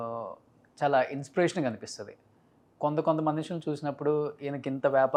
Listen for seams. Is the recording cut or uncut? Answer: uncut